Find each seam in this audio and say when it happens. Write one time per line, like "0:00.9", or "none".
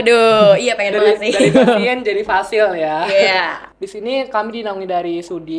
0:03.6